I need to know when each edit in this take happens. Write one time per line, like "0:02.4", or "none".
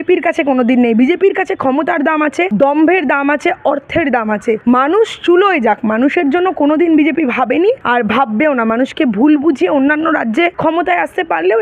0:02.5
0:04.6
0:07.8
0:10.6